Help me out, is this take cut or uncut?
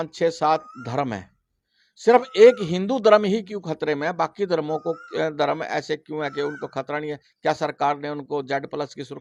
uncut